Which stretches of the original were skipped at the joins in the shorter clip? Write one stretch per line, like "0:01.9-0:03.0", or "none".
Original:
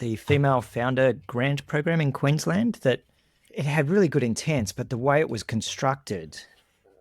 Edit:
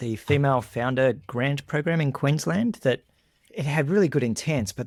none